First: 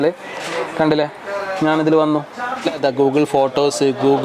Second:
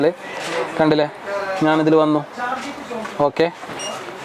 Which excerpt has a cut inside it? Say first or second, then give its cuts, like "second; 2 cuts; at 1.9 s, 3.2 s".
first; 1 cut; at 2.8 s